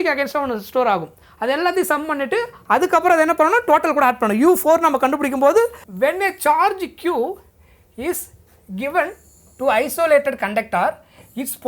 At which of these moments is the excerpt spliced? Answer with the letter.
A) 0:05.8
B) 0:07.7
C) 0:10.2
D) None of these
A